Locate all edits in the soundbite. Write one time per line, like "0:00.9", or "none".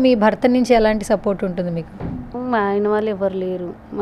none